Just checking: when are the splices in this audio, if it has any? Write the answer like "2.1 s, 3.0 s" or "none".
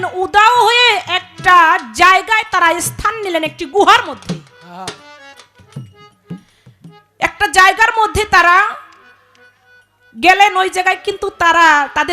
none